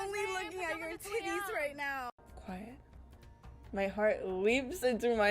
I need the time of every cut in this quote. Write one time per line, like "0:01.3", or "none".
0:02.2